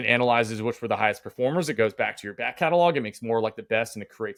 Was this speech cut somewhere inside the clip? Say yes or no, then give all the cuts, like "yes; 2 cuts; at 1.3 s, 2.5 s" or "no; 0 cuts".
no; 0 cuts